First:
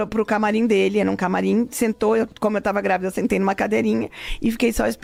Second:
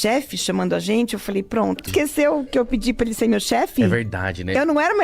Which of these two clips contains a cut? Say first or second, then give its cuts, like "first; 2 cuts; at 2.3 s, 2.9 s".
second; 1 cut; at 1.9 s